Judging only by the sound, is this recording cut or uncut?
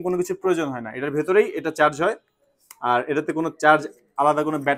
uncut